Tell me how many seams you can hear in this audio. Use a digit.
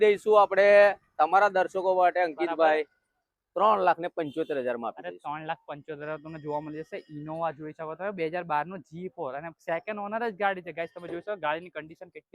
0